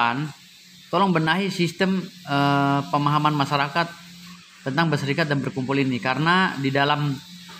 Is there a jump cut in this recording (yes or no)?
no